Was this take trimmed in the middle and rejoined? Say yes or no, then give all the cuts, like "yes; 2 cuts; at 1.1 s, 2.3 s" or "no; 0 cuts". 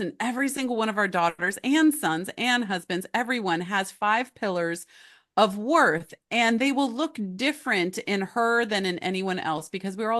no; 0 cuts